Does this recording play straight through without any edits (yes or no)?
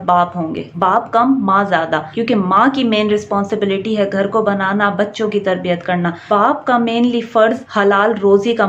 yes